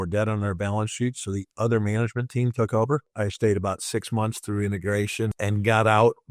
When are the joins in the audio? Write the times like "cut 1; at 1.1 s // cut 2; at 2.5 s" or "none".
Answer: cut 1; at 3.1 s // cut 2; at 5.4 s

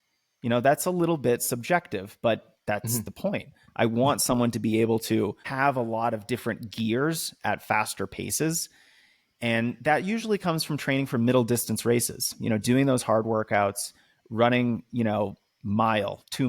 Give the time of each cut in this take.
cut 1; at 5.4 s

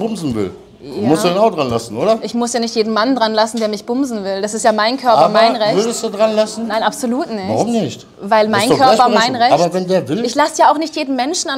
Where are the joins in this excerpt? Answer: none

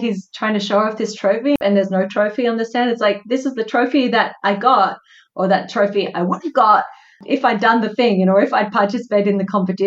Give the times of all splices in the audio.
cut 1; at 1.6 s

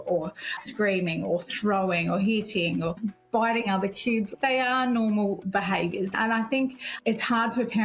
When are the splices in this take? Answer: cut 1; at 3.0 s // cut 2; at 4.3 s

